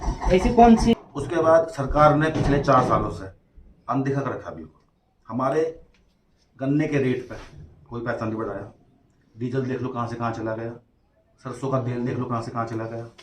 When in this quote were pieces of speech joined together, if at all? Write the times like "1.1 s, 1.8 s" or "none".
0.9 s